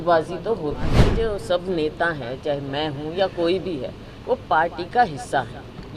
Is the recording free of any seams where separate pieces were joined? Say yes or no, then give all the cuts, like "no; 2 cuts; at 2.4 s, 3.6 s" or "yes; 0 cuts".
no; 1 cut; at 1.1 s